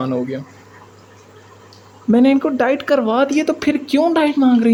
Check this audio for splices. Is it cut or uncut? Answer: uncut